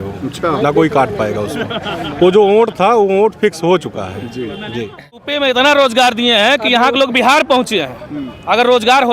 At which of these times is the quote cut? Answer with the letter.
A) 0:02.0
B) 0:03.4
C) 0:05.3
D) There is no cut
C